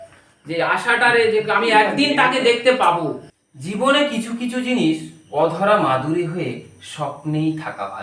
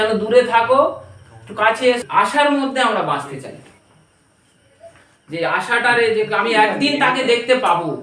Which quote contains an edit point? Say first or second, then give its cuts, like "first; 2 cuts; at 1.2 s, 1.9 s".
second; 1 cut; at 2.0 s